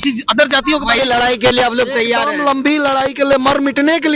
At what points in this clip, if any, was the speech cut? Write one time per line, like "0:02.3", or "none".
0:01.0